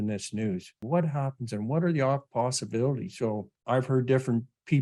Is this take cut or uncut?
cut